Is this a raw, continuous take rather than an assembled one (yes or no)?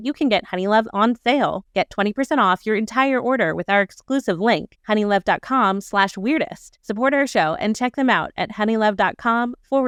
yes